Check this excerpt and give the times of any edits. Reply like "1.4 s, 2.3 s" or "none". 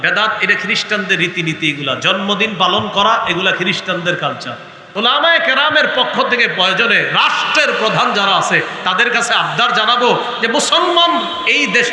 4.9 s

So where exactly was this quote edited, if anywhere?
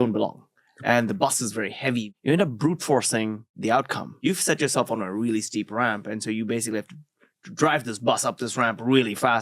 2.1 s, 3.9 s

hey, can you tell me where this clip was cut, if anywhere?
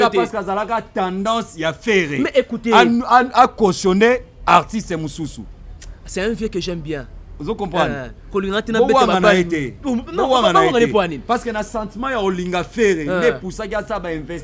none

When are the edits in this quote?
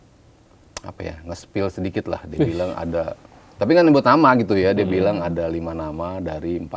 none

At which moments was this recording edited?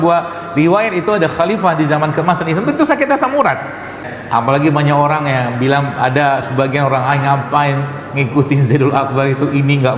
4.1 s

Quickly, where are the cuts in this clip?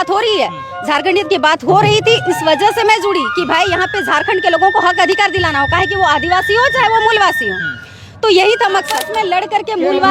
9.0 s

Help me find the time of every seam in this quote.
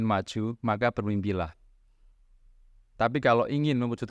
none

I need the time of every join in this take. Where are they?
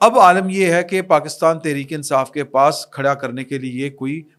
none

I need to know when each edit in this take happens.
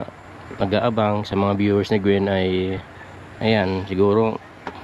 none

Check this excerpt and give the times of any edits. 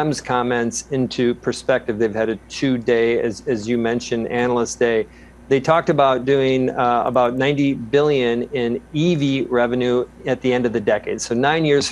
none

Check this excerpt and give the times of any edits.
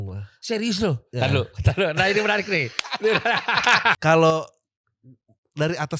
4.0 s

